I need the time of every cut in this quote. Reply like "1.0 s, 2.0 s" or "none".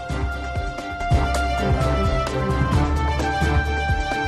0.9 s